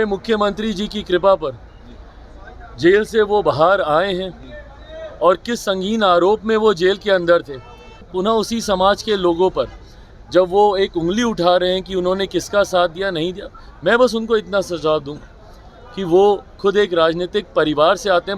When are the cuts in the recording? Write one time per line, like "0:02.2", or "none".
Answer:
0:08.1